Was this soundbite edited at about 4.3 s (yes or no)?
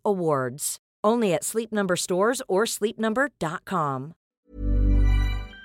yes